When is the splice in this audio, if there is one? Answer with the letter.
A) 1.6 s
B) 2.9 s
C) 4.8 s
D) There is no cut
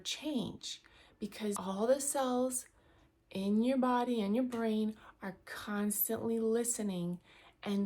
A